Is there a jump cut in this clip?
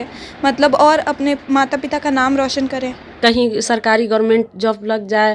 yes; 1 cut; at 3.1 s

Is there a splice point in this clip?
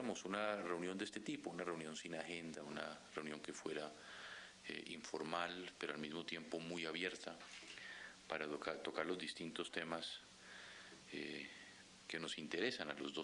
yes; 1 cut; at 10.3 s

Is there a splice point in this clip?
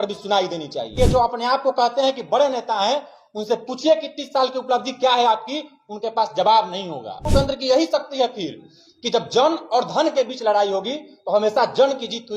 yes; 2 cuts; at 0.9 s, 7.3 s

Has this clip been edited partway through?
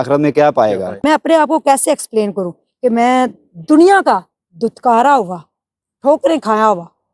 yes; 1 cut; at 1.0 s

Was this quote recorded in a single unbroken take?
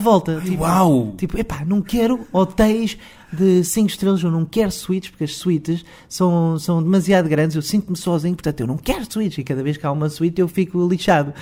yes; 0 cuts

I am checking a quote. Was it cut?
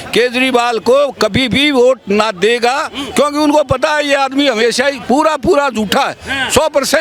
no; 0 cuts

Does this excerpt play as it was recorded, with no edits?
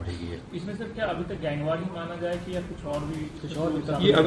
yes; 0 cuts

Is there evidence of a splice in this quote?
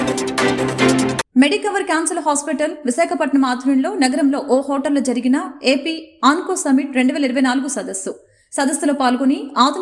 no; 0 cuts

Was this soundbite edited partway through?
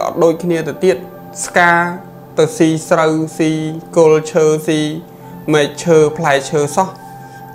no; 0 cuts

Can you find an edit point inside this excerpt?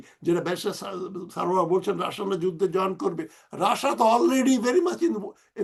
no; 0 cuts

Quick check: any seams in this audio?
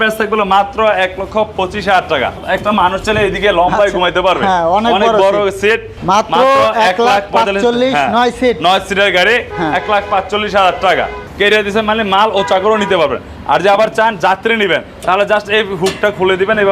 yes; 3 cuts; at 2.4 s, 5.9 s, 11.2 s

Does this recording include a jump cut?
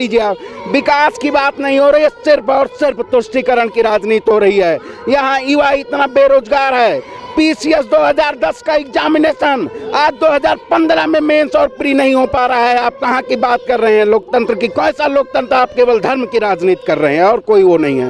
no; 0 cuts

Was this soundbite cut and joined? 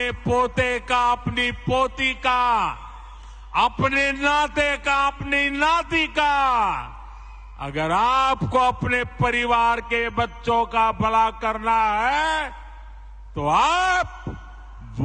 no; 0 cuts

